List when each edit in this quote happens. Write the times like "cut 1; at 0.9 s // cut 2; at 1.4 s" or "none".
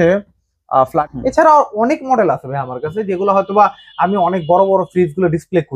cut 1; at 1.0 s